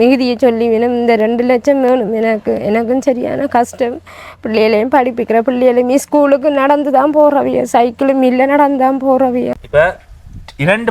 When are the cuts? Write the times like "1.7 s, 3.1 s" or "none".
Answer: 9.6 s